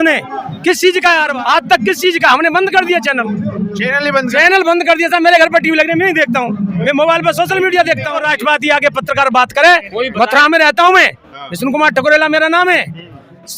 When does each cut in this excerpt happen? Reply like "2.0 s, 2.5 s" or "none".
1.3 s, 8.2 s